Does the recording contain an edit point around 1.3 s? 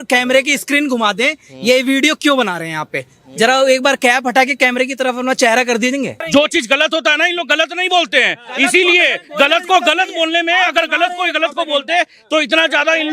no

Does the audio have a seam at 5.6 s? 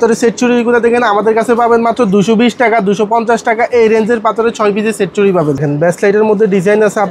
yes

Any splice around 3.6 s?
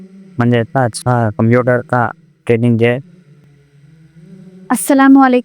yes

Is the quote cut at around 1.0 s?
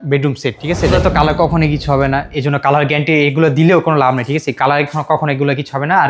yes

